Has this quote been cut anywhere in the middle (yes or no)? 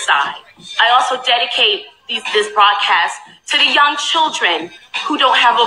yes